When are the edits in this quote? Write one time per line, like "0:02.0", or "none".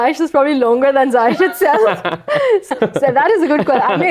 0:02.7